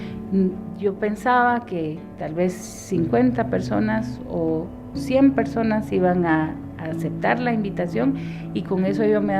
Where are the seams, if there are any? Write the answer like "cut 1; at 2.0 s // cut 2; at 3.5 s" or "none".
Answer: cut 1; at 7.4 s